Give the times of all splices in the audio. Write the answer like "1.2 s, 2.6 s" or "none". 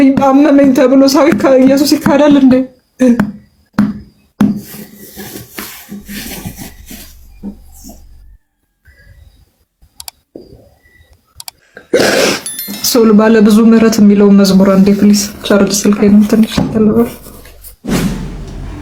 none